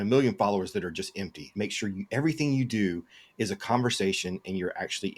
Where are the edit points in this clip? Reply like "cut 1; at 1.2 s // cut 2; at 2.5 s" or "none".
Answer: cut 1; at 1.5 s